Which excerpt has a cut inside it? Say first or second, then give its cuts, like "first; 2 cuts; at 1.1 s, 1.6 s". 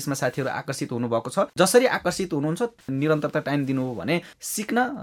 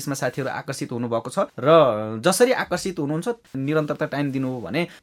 first; 1 cut; at 1.5 s